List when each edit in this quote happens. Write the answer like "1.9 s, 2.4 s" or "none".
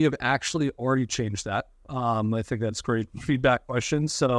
none